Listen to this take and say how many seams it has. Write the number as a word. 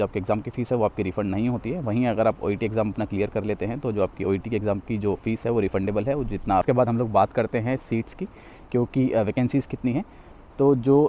one